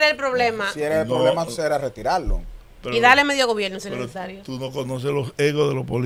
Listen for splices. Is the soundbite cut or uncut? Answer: uncut